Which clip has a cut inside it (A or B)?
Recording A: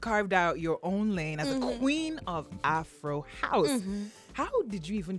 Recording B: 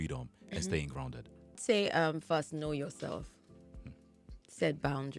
B